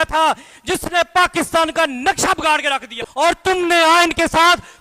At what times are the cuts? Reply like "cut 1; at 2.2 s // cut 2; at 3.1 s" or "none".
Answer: cut 1; at 3.2 s